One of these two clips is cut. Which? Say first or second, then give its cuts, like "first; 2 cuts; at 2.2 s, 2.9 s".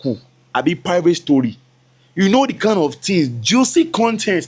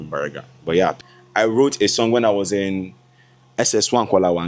second; 1 cut; at 1.0 s